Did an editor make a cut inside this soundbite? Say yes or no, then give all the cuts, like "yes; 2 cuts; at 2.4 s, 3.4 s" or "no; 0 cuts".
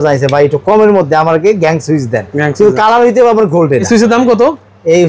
yes; 1 cut; at 3.9 s